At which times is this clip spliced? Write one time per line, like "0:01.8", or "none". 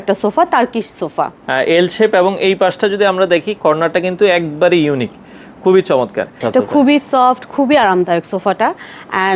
0:01.4
0:06.4